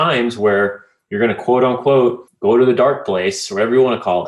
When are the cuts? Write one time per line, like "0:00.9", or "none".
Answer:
0:02.3